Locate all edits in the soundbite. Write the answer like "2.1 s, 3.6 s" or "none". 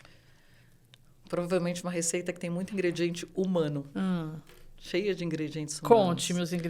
none